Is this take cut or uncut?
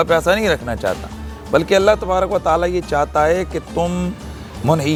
uncut